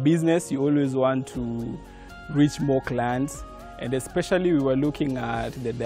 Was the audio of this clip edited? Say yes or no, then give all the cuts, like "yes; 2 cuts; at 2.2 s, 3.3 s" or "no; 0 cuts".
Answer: no; 0 cuts